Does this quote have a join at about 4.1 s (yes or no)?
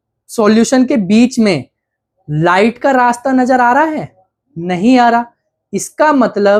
no